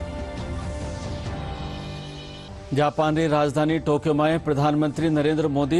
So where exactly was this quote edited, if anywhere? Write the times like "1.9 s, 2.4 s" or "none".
1.2 s, 2.5 s